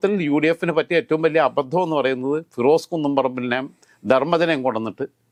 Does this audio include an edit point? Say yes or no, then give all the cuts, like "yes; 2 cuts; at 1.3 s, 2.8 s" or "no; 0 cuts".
no; 0 cuts